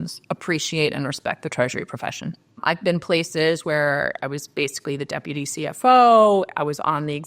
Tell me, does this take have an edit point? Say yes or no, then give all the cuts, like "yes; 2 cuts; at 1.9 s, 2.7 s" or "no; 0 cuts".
yes; 1 cut; at 2.5 s